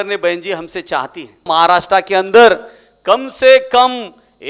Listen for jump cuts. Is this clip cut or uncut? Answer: cut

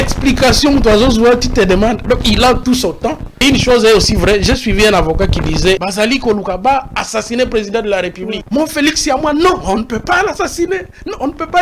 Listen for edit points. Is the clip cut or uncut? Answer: cut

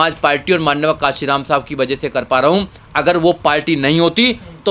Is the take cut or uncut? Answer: uncut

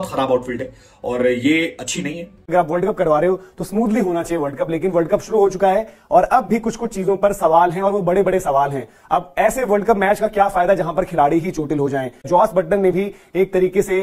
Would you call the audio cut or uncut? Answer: cut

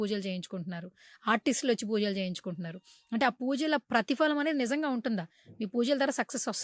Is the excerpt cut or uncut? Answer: uncut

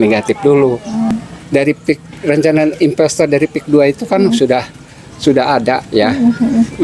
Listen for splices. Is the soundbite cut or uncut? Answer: cut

